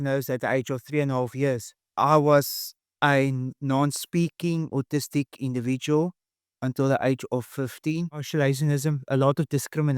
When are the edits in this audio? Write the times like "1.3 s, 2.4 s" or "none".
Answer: 1.8 s, 8.3 s

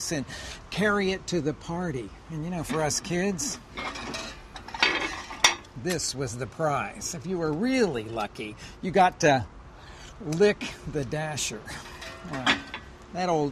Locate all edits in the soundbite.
12.0 s

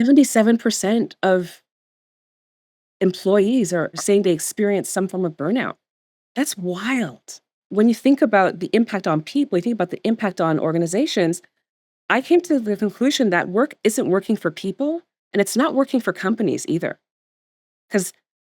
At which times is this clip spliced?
7.6 s

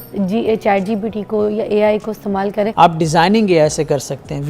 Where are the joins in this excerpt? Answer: 2.7 s

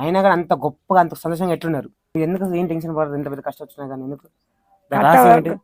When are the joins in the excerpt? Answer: 2.1 s

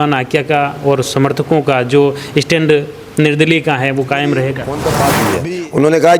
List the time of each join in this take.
5.1 s

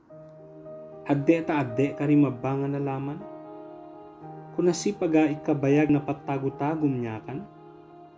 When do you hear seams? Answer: 7.2 s

